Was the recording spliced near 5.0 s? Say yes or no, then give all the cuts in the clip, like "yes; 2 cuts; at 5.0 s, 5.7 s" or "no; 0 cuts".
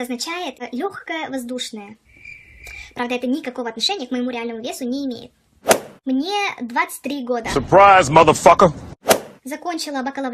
yes; 1 cut; at 5.0 s